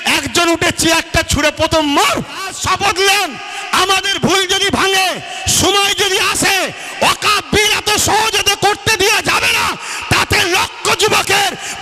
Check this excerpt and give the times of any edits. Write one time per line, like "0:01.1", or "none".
0:02.5